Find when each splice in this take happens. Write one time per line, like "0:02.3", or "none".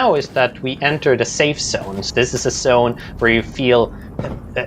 0:02.0